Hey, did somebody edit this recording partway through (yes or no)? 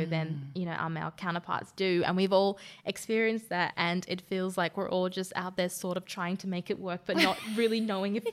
yes